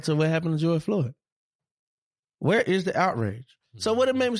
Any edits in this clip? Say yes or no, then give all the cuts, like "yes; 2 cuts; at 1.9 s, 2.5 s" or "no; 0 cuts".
no; 0 cuts